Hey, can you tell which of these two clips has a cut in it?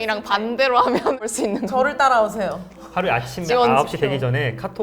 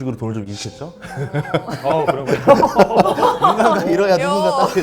first; 1 cut; at 1.2 s

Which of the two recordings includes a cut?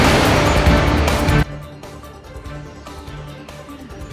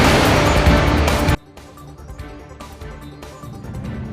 second; 1 cut; at 1.2 s

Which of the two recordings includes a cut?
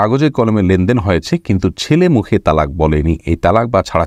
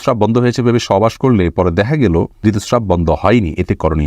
second; 1 cut; at 2.3 s

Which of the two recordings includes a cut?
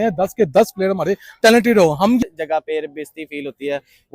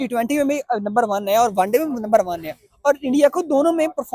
first; 1 cut; at 2.2 s

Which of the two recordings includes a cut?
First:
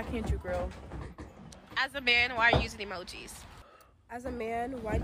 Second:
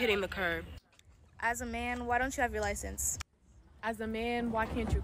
first; 2 cuts; at 1.3 s, 4.0 s

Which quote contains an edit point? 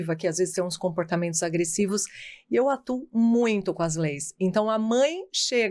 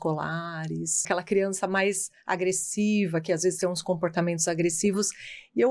second; 1 cut; at 1.0 s

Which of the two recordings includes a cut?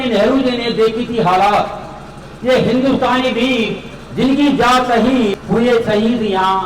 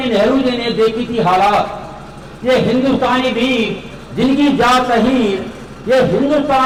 first; 1 cut; at 5.4 s

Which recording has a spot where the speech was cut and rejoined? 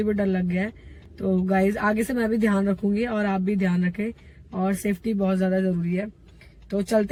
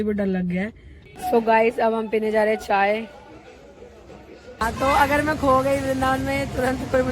second; 2 cuts; at 1.1 s, 4.6 s

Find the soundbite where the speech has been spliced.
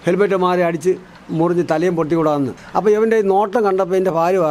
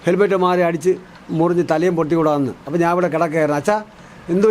first; 1 cut; at 2.6 s

